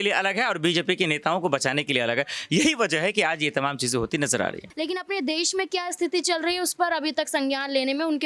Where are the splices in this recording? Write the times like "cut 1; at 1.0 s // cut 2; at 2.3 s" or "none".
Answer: cut 1; at 4.7 s